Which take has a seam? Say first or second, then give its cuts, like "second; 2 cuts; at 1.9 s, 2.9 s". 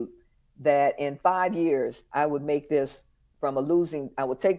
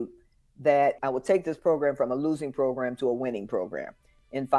second; 1 cut; at 1.0 s